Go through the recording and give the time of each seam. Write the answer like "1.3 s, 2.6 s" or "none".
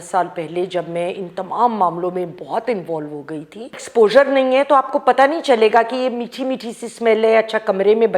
3.8 s